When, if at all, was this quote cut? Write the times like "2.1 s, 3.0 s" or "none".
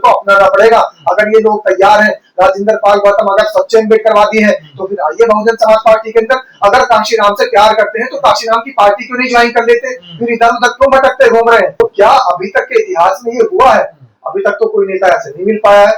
11.7 s